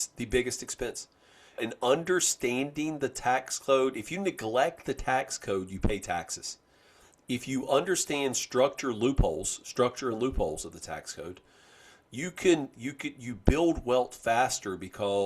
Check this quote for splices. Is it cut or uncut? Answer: cut